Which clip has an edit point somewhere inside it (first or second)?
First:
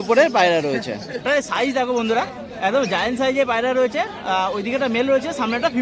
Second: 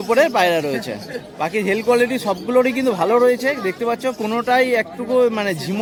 first